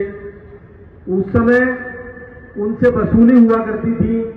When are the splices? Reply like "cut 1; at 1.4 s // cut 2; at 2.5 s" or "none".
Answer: none